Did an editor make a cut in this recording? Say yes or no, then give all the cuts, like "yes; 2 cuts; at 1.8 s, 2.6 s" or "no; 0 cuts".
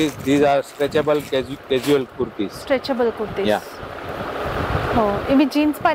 no; 0 cuts